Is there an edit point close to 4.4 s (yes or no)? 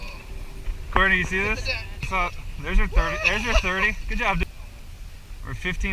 yes